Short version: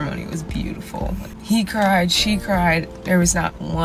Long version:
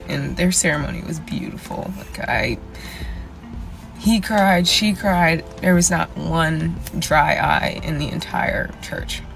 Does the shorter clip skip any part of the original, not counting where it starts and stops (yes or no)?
yes